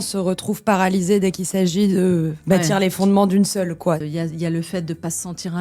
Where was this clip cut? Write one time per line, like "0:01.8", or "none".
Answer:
0:02.3
0:04.0